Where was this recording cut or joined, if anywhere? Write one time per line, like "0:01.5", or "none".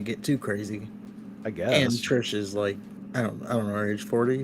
0:02.9